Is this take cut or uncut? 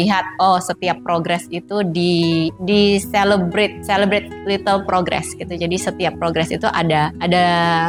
uncut